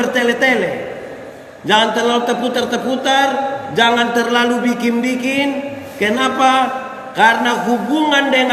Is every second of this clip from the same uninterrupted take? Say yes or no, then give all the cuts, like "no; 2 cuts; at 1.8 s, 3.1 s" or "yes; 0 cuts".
yes; 0 cuts